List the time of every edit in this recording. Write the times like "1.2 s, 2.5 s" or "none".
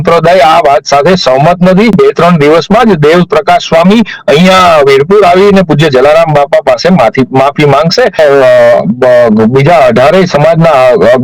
1.9 s, 8.2 s

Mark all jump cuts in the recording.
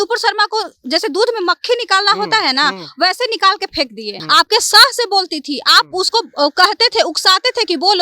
4.1 s

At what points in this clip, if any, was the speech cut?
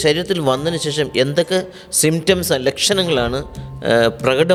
none

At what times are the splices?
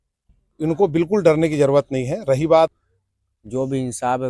2.7 s

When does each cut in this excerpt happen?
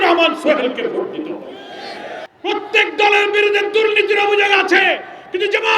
2.2 s

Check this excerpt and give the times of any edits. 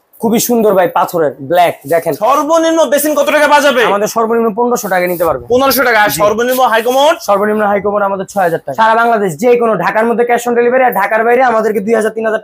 2.2 s, 8.6 s

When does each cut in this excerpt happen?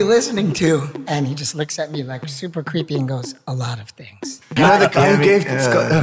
4.5 s

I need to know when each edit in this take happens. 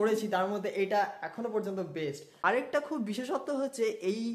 2.3 s

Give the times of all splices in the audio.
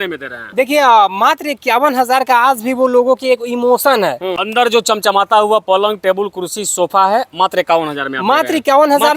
4.3 s

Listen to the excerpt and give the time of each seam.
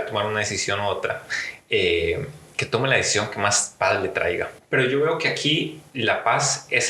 4.6 s

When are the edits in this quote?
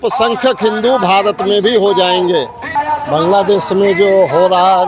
2.8 s

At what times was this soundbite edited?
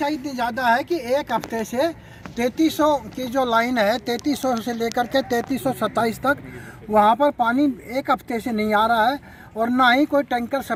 none

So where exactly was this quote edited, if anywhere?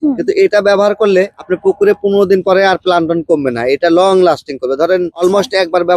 none

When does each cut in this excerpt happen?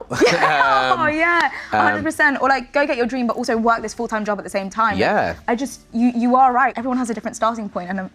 none

